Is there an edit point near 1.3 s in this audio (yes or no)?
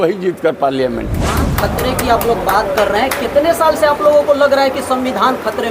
yes